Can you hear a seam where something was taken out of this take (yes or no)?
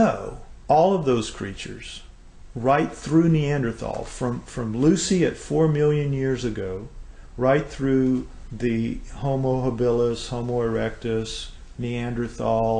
yes